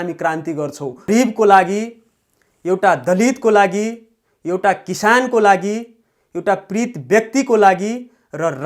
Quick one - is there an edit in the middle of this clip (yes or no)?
yes